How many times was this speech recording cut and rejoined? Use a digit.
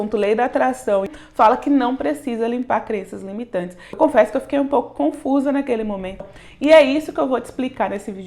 3